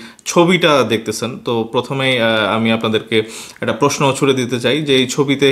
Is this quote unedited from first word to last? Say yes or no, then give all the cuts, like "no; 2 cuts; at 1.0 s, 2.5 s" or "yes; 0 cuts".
yes; 0 cuts